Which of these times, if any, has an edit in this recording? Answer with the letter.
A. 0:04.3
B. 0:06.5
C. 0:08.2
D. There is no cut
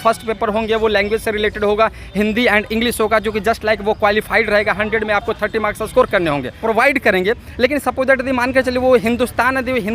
B